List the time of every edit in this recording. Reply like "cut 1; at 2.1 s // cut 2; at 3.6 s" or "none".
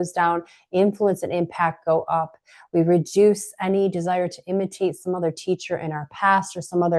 none